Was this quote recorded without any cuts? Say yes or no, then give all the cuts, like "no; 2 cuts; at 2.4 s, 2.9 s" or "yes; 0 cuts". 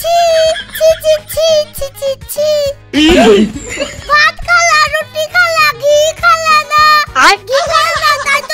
yes; 0 cuts